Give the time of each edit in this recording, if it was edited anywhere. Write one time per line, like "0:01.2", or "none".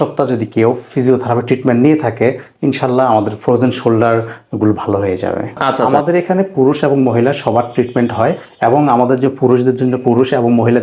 0:05.8